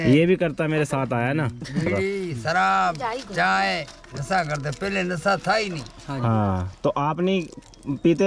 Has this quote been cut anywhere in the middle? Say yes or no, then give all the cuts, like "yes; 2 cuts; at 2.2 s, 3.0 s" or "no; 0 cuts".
yes; 1 cut; at 1.9 s